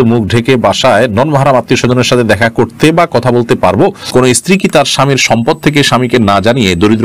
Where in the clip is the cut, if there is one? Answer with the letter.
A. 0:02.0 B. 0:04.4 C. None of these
B